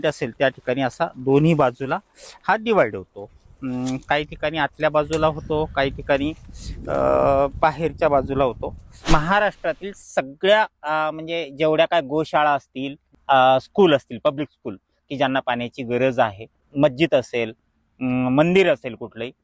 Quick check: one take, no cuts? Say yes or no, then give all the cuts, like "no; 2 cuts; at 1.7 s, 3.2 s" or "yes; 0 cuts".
no; 3 cuts; at 9.0 s, 13.1 s, 16.7 s